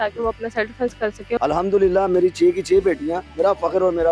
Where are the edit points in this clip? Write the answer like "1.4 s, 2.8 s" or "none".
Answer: 1.4 s